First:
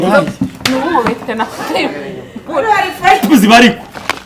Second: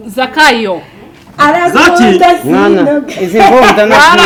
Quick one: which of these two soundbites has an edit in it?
first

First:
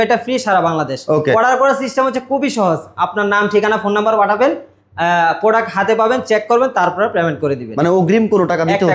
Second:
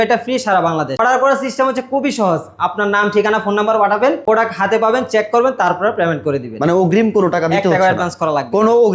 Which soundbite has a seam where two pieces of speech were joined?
second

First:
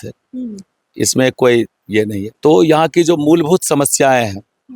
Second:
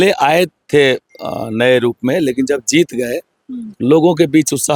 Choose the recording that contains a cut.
first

